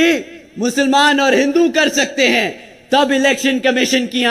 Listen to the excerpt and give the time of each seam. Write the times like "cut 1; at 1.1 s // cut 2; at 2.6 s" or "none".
none